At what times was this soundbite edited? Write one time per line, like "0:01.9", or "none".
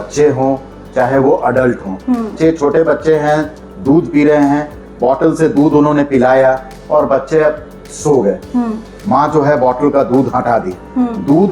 0:02.3